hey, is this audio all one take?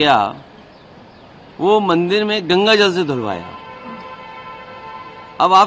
yes; 0 cuts

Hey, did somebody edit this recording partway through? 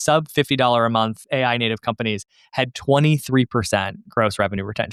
no; 0 cuts

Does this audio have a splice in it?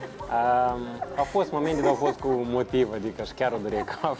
no; 0 cuts

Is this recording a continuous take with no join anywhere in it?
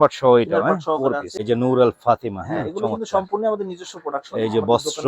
no; 1 cut; at 1.3 s

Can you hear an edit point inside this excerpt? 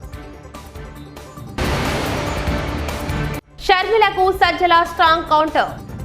yes; 1 cut; at 3.5 s

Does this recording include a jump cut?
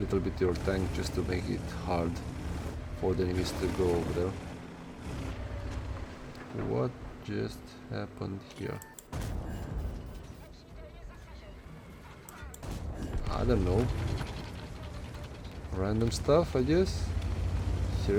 no; 0 cuts

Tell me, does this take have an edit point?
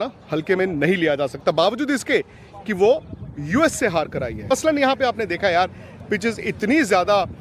yes; 1 cut; at 4.4 s

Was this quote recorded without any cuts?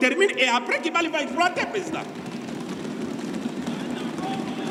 yes; 0 cuts

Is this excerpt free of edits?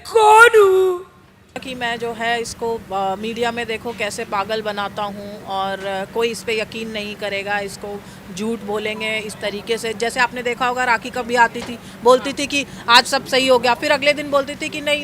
no; 1 cut; at 1.7 s

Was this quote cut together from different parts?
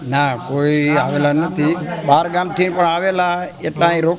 no; 0 cuts

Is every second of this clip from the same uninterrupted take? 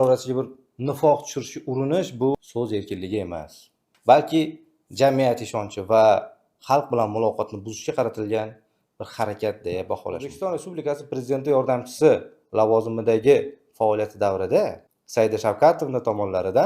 no; 1 cut; at 10.3 s

